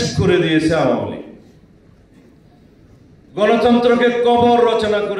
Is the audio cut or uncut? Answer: uncut